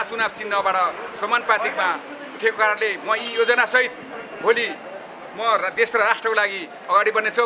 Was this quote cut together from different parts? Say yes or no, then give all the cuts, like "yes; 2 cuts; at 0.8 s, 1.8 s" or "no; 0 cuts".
no; 0 cuts